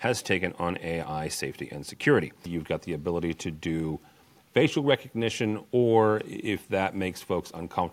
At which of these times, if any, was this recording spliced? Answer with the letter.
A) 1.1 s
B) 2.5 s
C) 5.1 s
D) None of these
B